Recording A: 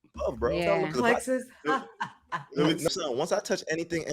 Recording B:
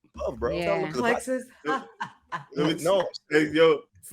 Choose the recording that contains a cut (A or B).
A